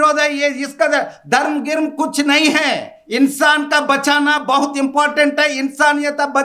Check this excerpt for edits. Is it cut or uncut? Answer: uncut